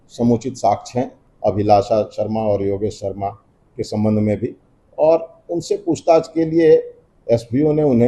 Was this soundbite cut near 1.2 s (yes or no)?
yes